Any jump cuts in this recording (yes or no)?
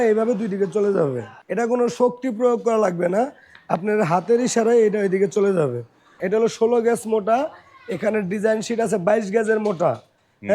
yes